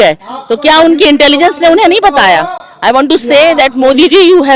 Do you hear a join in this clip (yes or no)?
no